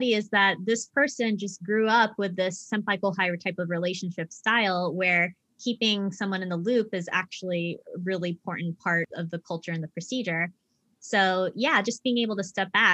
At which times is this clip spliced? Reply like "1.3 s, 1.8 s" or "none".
2.6 s, 9.1 s